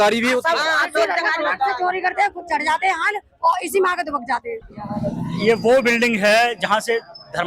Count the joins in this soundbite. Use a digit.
1